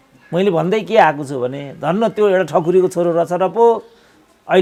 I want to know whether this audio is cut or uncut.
uncut